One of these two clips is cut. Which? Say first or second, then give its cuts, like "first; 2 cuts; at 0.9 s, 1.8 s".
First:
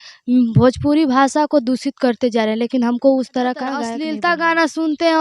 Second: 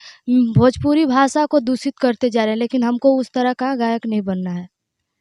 first; 1 cut; at 4.0 s